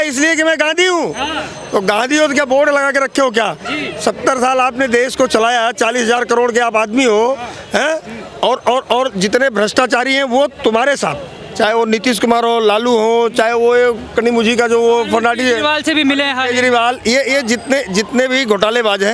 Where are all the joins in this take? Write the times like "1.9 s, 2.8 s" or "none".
none